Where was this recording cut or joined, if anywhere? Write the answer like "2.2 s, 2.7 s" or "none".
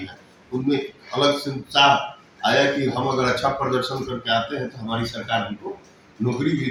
none